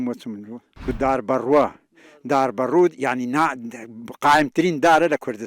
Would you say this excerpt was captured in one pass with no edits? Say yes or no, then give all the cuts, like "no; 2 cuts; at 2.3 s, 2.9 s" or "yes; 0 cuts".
no; 1 cut; at 0.9 s